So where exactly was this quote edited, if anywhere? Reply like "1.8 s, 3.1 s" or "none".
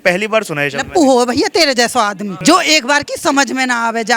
2.3 s

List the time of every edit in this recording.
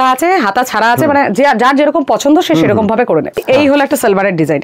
3.4 s

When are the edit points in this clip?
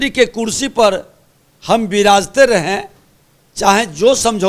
none

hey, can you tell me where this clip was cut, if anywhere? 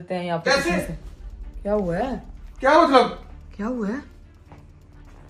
none

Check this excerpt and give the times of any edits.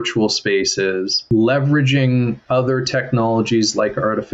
1.2 s

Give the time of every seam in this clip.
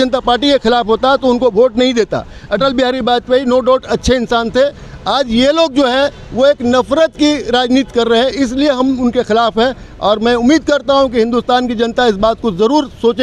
none

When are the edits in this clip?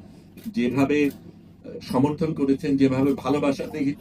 none

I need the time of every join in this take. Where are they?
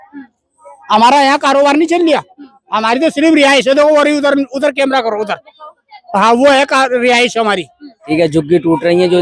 8.1 s

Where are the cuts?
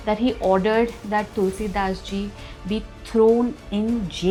none

